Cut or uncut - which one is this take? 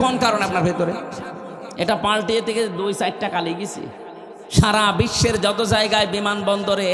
uncut